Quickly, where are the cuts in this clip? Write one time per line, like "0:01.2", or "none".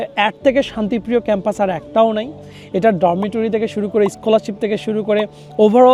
none